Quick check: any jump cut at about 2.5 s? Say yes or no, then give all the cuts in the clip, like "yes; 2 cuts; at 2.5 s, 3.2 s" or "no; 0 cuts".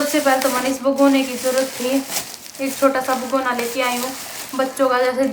no; 0 cuts